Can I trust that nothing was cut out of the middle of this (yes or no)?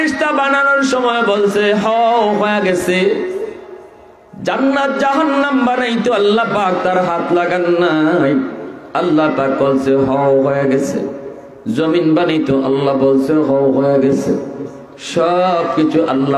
yes